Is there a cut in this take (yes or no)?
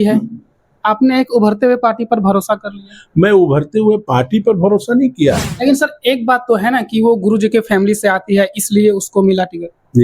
yes